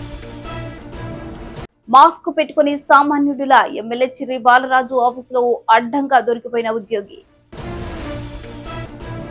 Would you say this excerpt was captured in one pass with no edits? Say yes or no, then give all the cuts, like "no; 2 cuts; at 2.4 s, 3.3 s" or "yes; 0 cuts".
no; 1 cut; at 1.6 s